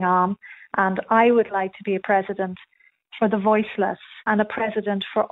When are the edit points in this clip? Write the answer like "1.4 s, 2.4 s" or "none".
4.2 s